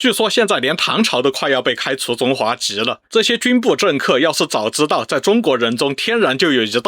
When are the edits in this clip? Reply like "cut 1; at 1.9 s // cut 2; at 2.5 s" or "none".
cut 1; at 3.0 s